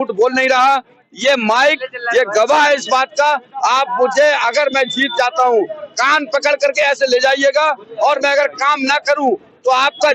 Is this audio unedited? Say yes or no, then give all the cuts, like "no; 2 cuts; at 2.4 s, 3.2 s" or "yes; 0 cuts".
yes; 0 cuts